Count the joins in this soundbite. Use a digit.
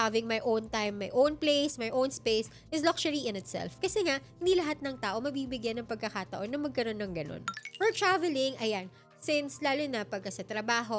0